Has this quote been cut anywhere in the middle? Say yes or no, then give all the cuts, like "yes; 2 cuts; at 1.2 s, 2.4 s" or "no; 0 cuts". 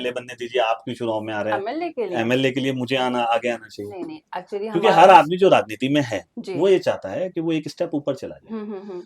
no; 0 cuts